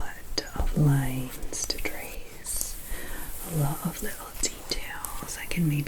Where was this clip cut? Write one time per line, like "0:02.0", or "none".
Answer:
none